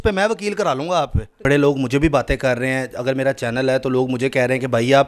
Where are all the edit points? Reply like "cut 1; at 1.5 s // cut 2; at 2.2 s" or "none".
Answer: cut 1; at 1.5 s